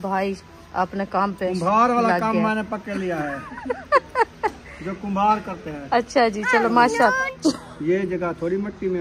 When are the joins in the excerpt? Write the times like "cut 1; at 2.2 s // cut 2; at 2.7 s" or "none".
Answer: cut 1; at 7.3 s